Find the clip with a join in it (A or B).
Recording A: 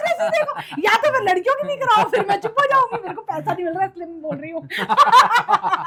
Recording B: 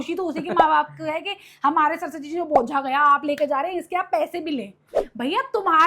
B